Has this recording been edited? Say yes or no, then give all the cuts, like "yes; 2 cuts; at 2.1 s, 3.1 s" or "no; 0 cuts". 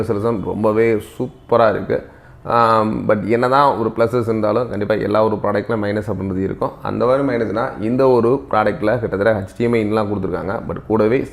no; 0 cuts